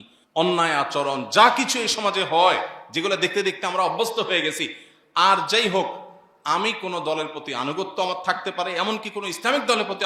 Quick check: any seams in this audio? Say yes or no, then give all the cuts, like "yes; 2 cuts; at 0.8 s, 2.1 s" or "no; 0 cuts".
no; 0 cuts